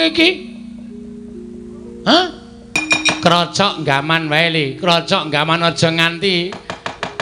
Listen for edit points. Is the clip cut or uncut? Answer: cut